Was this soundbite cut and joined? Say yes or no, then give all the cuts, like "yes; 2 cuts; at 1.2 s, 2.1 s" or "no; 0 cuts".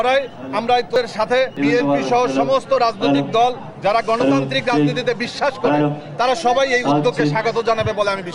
no; 0 cuts